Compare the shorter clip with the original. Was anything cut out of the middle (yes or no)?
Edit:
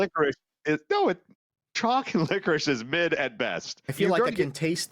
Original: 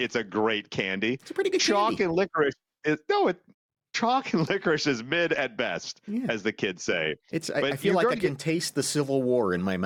yes